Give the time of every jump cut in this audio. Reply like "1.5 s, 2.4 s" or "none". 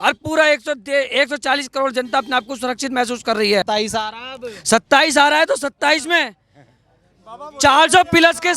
3.6 s